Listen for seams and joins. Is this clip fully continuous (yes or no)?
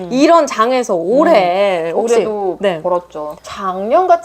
yes